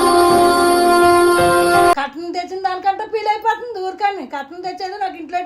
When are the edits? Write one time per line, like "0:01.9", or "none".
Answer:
0:02.0